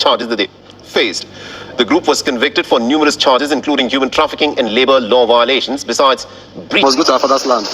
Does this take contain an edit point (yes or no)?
yes